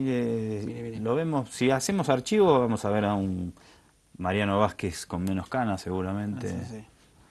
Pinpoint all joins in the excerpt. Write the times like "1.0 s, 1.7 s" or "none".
none